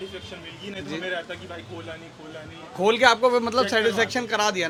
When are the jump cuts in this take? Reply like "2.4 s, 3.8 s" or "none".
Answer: none